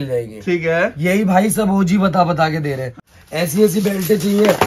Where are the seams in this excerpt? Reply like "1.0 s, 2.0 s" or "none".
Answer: 2.9 s